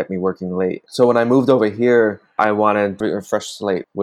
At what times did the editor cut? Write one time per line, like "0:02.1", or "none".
0:02.4